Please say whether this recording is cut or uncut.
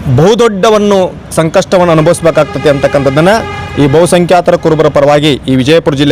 uncut